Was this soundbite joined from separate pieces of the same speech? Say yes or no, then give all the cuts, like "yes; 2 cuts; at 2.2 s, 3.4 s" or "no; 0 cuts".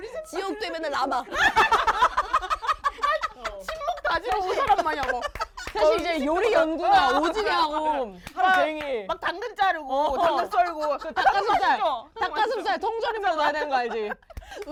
no; 0 cuts